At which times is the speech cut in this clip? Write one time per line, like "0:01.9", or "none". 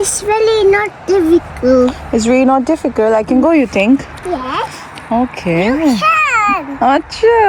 none

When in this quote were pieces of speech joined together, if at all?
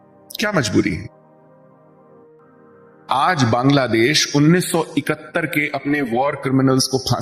0:02.2

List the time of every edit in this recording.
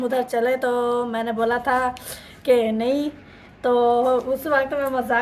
none

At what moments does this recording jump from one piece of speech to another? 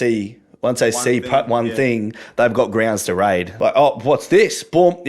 0:03.5

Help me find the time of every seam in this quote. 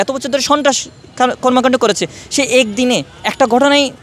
none

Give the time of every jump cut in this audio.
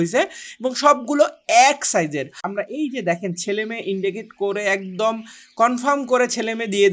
0:02.5

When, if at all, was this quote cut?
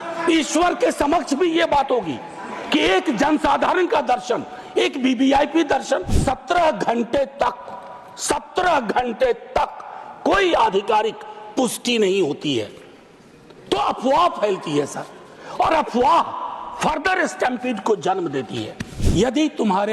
0:06.2
0:19.0

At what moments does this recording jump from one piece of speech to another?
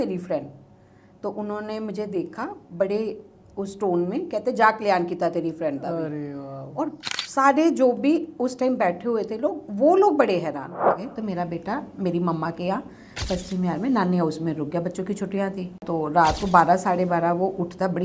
0:11.1
0:15.8

